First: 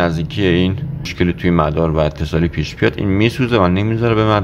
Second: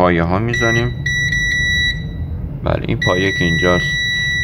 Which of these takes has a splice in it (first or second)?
first